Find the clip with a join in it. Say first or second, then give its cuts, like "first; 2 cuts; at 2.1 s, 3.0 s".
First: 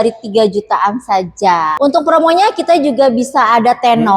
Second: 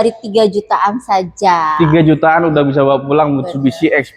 first; 1 cut; at 1.7 s